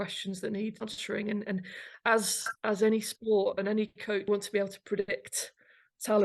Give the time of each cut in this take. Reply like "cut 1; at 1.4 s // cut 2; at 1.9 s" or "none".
cut 1; at 0.8 s // cut 2; at 4.3 s